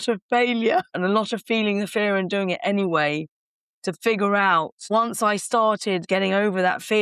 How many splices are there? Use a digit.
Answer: 3